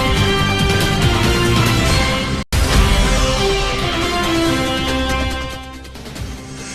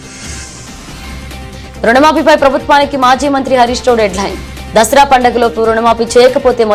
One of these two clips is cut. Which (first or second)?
first